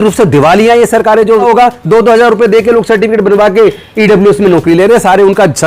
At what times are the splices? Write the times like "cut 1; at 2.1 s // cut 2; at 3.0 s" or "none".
cut 1; at 1.4 s